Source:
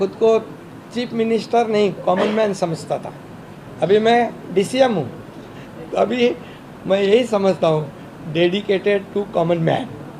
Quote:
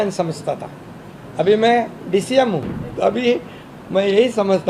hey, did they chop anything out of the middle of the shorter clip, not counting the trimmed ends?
yes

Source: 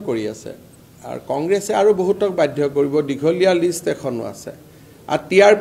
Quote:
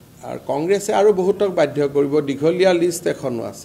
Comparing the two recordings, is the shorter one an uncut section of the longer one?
yes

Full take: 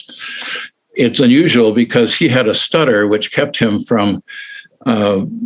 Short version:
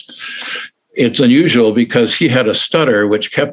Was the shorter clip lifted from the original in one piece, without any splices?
yes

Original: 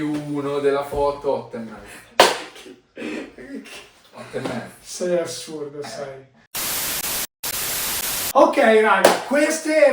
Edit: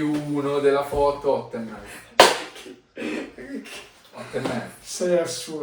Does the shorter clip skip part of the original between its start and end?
no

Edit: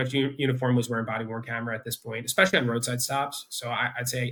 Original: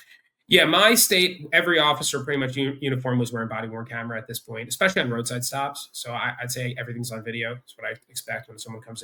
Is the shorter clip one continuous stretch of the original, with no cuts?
yes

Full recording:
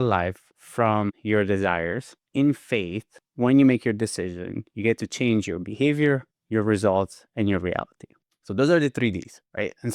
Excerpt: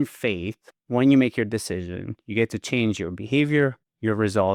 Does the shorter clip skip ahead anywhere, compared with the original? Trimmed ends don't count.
no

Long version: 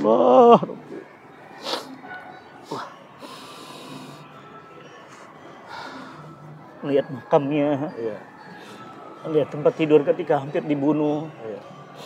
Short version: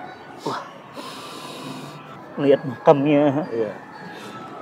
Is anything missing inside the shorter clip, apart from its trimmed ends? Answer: yes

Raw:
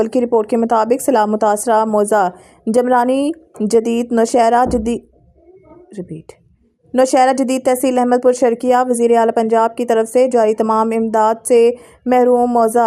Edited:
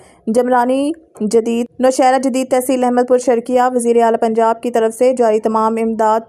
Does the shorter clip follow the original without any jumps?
no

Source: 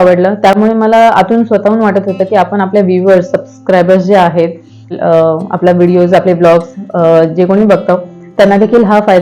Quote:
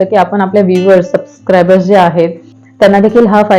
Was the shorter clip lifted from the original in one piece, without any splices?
no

